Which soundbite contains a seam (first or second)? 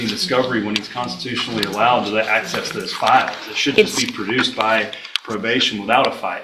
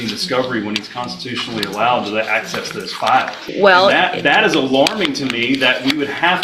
second